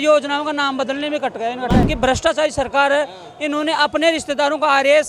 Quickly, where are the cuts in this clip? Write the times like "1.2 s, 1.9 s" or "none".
1.9 s